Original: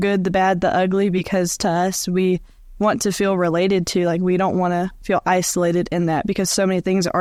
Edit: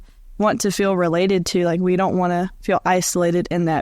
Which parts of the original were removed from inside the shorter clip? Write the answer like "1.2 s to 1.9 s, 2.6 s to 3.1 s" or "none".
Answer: none